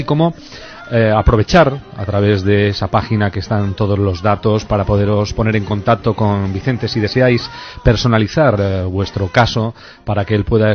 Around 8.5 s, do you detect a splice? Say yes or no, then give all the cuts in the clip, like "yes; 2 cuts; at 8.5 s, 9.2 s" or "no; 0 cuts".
yes; 1 cut; at 8.5 s